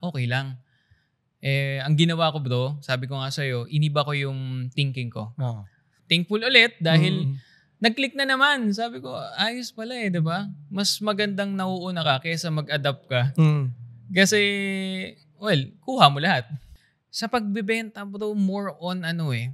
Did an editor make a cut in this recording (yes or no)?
yes